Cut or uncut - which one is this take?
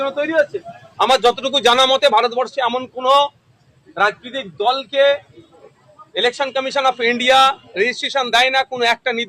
uncut